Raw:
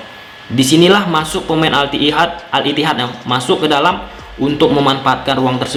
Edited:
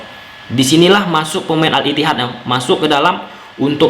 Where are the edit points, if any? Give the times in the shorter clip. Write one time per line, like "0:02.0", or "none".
0:01.7